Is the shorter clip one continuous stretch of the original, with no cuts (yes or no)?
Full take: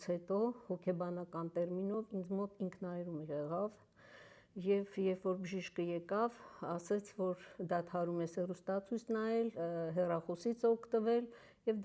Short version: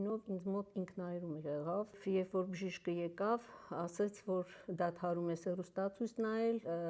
no